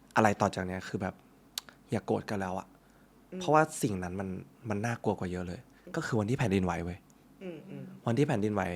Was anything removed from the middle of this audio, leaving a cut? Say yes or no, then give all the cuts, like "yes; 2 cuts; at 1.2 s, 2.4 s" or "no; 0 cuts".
no; 0 cuts